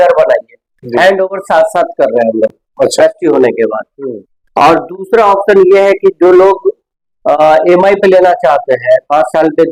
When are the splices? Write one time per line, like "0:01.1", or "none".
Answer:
none